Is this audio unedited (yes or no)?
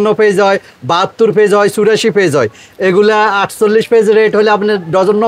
yes